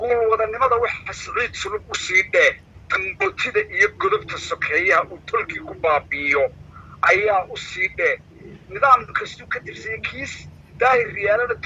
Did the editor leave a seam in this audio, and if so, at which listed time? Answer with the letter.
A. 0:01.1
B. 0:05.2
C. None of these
C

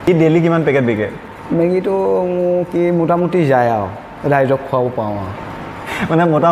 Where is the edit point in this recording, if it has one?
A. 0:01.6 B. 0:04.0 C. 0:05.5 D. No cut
D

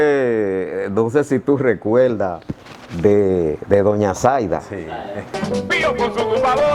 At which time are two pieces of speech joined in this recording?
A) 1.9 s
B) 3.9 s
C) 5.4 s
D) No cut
C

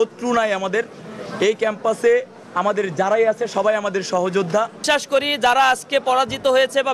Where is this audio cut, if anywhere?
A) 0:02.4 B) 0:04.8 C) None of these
B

